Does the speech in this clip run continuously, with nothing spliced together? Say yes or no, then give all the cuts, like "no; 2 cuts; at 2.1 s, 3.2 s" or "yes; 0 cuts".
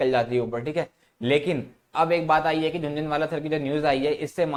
yes; 0 cuts